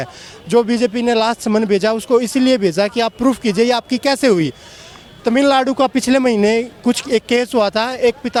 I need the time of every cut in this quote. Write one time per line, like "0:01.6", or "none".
none